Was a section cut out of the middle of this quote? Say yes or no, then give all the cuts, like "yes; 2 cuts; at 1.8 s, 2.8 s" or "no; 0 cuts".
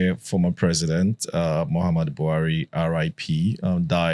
no; 0 cuts